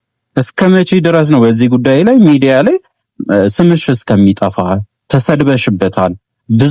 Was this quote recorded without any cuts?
yes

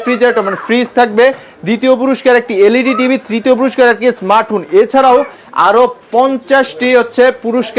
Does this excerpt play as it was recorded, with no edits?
yes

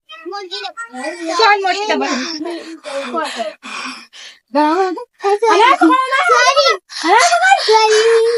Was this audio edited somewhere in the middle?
no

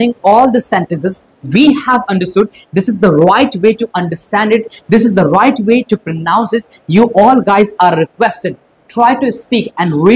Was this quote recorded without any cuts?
yes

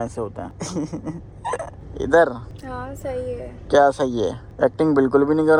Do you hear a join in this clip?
no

